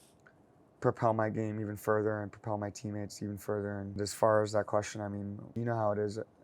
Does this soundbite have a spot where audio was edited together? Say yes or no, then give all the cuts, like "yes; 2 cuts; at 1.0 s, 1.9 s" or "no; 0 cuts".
yes; 2 cuts; at 3.9 s, 5.5 s